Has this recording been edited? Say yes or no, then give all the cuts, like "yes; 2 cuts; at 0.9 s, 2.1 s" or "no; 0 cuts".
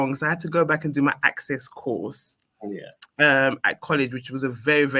no; 0 cuts